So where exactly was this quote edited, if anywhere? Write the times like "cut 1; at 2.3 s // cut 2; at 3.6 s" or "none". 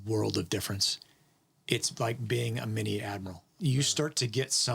cut 1; at 3.5 s